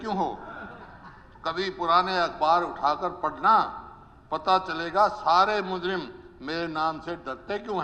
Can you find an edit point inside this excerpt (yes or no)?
no